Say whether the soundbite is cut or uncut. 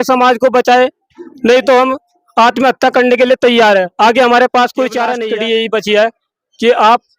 cut